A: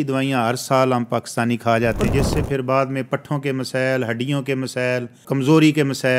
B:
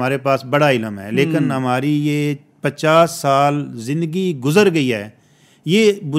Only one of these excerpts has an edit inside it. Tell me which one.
A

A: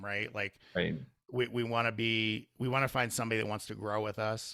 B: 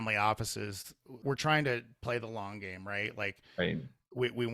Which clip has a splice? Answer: B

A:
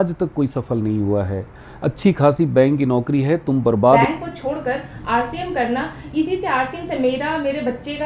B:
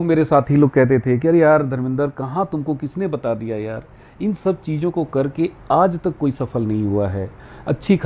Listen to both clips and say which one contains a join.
A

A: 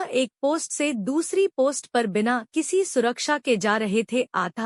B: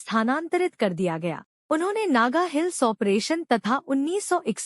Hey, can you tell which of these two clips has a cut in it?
B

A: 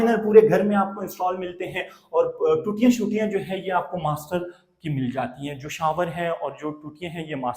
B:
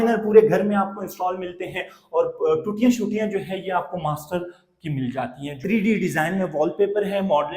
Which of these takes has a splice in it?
B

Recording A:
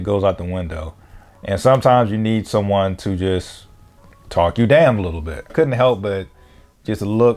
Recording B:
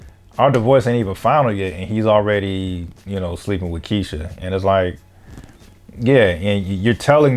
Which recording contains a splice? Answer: A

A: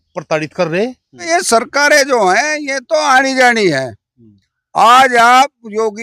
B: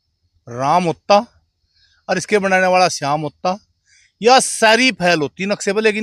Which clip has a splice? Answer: A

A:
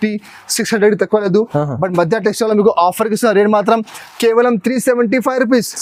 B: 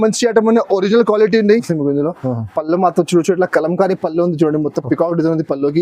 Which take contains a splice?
B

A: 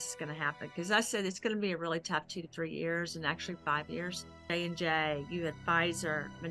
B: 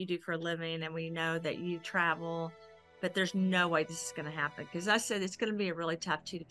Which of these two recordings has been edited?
A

